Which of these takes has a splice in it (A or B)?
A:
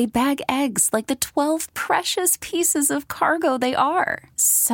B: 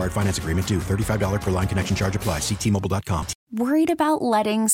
B